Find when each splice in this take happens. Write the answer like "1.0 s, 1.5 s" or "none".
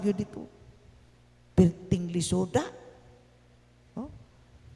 none